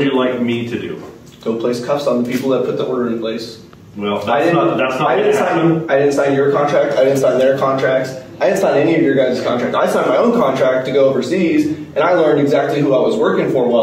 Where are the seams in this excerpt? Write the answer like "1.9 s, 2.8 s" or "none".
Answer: none